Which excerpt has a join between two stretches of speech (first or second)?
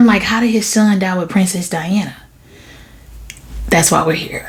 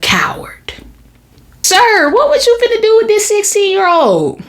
second